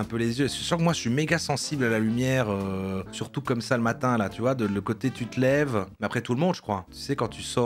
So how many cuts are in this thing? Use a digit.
0